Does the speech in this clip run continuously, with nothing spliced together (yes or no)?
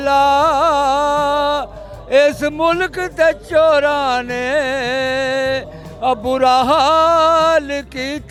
yes